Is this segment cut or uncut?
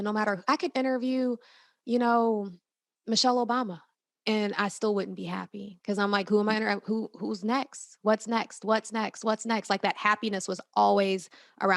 uncut